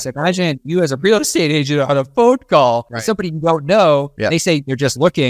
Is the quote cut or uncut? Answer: cut